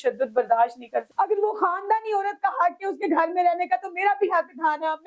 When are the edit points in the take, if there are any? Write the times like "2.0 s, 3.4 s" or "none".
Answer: 1.1 s